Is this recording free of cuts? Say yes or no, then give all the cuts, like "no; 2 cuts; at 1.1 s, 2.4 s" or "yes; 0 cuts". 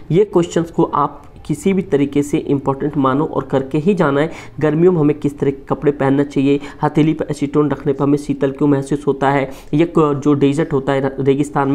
yes; 0 cuts